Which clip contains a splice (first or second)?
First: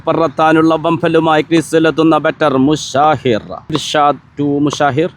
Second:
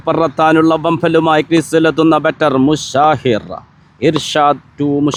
first